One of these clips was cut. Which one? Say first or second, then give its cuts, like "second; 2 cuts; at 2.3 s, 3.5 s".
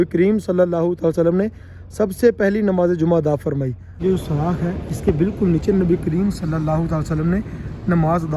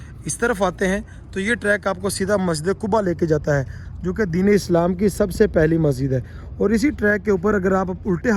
first; 1 cut; at 4.0 s